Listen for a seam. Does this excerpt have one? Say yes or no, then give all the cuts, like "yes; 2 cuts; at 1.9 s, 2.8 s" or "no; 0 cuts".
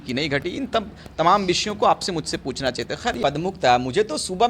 yes; 1 cut; at 3.2 s